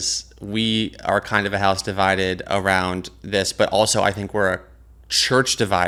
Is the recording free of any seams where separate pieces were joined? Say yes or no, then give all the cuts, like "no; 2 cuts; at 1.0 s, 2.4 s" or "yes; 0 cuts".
yes; 0 cuts